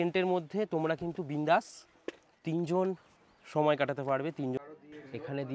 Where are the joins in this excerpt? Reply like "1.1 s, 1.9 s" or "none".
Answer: 4.6 s